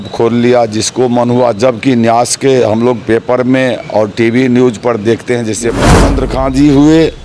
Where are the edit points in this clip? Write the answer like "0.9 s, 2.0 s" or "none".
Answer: 6.0 s

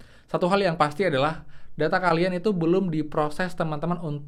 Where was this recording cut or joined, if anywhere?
none

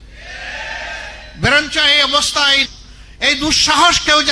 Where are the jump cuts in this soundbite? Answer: 2.7 s

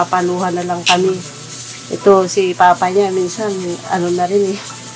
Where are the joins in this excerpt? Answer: none

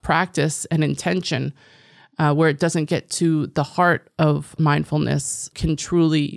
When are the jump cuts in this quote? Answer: 4.5 s, 5.5 s

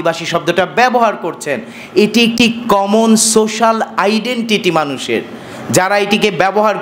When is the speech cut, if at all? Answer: none

